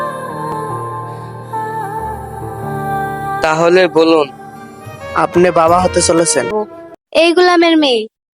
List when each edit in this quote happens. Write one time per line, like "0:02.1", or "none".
0:06.5